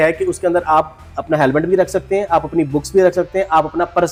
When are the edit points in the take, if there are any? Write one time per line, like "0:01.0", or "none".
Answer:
none